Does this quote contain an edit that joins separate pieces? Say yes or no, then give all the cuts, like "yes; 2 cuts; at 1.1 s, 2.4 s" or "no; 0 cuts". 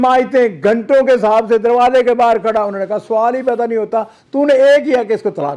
no; 0 cuts